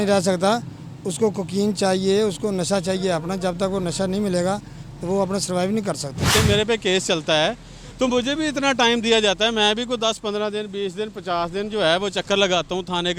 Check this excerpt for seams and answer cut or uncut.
cut